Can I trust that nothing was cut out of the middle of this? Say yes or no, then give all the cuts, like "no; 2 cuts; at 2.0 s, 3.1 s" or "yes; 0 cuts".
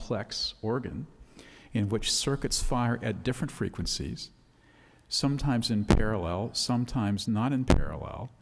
no; 1 cut; at 2.1 s